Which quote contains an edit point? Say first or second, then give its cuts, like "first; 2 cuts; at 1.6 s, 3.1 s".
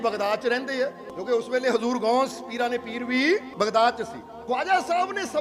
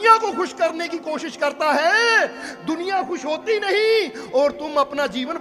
first; 3 cuts; at 1.1 s, 3.5 s, 4.3 s